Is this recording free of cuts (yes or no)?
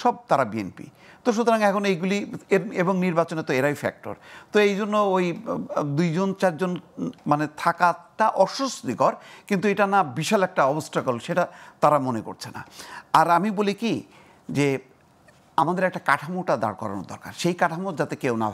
yes